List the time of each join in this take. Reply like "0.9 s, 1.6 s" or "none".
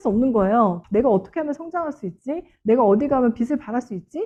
none